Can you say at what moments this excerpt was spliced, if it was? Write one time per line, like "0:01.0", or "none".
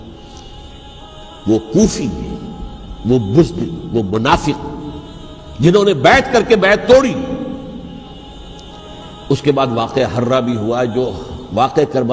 0:08.1